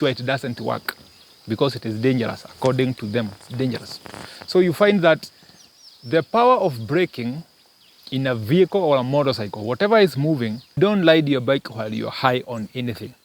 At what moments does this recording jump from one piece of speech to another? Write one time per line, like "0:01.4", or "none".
0:10.8